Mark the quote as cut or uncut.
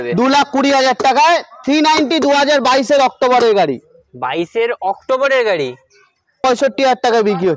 cut